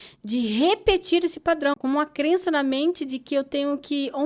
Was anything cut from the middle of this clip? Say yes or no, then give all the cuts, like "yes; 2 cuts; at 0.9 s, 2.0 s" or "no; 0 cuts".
yes; 1 cut; at 1.8 s